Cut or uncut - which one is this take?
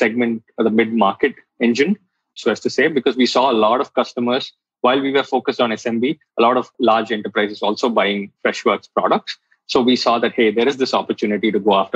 cut